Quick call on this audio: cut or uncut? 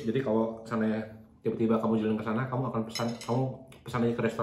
uncut